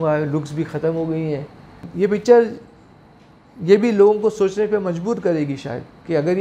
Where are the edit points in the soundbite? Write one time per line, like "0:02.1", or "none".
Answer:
0:01.9